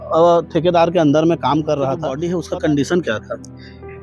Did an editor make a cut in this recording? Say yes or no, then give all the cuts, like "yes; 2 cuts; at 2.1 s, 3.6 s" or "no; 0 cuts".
yes; 1 cut; at 2.1 s